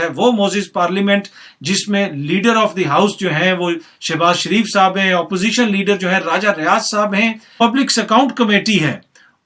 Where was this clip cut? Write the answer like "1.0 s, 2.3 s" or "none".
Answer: 7.5 s